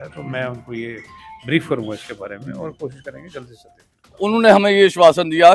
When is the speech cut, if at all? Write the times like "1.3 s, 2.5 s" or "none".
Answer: 4.2 s